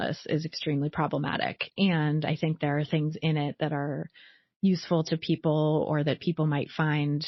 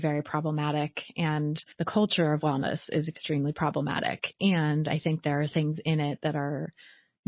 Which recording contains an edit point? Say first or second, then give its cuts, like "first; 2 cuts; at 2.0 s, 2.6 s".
second; 1 cut; at 1.6 s